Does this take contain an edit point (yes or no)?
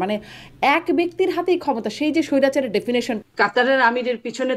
yes